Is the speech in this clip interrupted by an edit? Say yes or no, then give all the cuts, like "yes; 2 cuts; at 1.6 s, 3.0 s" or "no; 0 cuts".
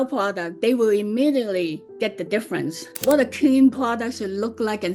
yes; 2 cuts; at 1.8 s, 3.0 s